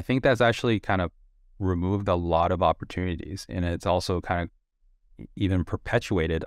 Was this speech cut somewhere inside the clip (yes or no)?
no